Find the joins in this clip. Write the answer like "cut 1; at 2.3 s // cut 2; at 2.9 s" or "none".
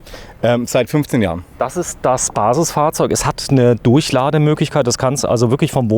cut 1; at 1.5 s